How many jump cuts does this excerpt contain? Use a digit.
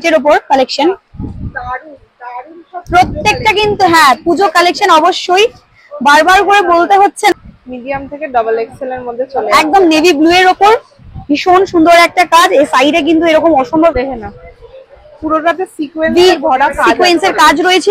2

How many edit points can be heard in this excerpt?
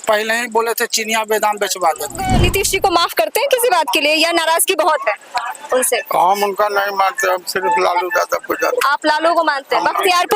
1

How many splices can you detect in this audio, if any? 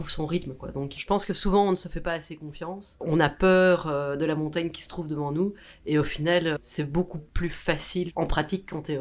2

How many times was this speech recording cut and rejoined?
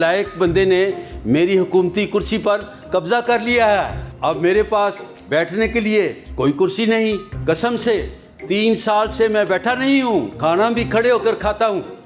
0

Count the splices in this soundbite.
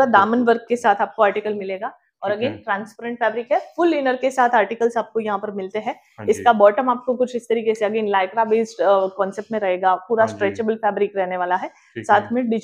0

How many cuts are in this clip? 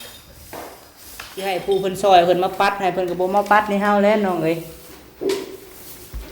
1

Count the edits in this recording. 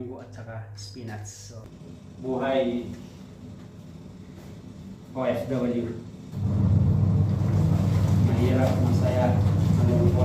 1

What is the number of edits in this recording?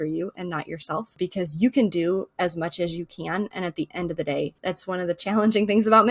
2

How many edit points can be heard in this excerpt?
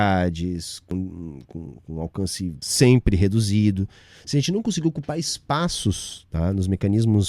2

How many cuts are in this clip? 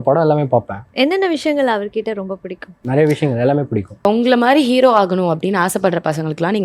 1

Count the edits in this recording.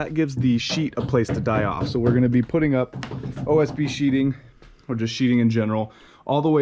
0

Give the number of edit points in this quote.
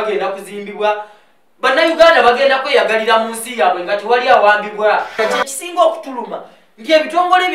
1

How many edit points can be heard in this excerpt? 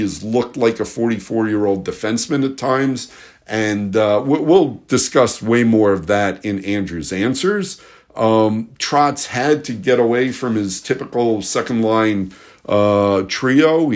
0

